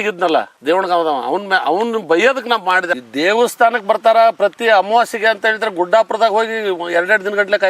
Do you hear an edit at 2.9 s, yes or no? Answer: yes